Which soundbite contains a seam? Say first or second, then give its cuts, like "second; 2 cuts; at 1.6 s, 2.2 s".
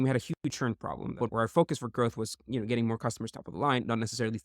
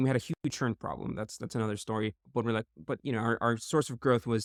first; 1 cut; at 1.2 s